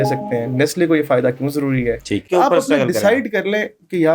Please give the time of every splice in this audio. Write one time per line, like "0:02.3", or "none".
0:02.2